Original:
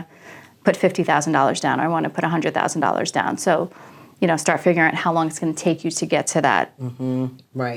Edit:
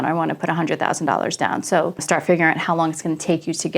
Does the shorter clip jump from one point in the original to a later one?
yes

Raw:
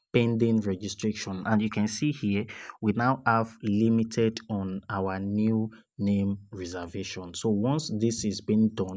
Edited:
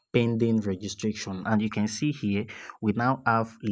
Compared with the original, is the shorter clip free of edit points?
yes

